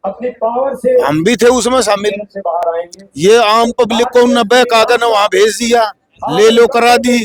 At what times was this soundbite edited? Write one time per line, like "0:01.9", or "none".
none